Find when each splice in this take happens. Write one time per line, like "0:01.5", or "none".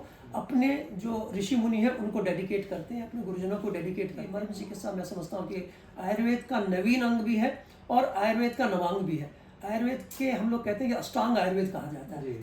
0:04.3